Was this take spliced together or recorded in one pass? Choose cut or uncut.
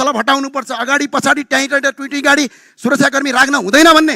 uncut